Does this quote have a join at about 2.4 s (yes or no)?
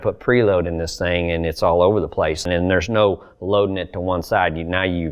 yes